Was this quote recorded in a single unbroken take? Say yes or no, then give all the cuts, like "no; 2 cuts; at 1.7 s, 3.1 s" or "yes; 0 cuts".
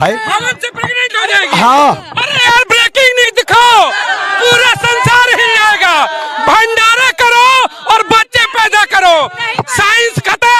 yes; 0 cuts